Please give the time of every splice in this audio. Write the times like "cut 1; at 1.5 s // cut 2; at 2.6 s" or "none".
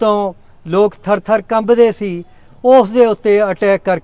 none